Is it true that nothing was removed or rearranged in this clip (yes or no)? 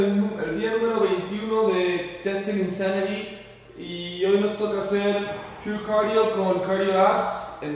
no